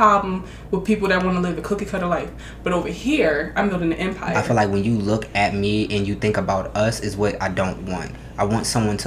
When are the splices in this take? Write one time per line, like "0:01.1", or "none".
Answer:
0:04.4